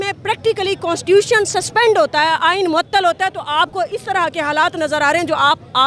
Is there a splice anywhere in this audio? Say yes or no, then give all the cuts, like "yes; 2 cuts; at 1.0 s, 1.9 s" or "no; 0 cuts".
no; 0 cuts